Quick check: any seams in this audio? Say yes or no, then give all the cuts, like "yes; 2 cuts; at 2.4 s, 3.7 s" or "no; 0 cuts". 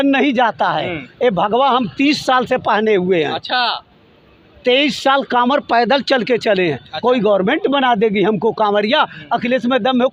no; 0 cuts